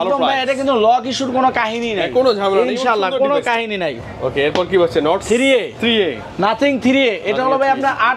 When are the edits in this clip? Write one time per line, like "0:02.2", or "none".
none